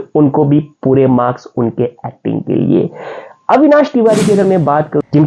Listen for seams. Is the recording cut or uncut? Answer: uncut